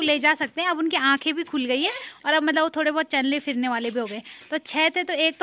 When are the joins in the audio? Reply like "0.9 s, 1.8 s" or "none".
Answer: none

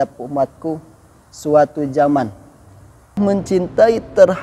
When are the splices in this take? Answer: 3.2 s

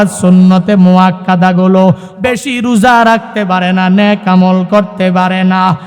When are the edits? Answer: 2.1 s

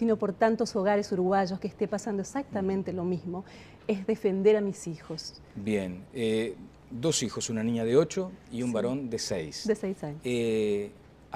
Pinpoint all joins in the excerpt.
2.2 s

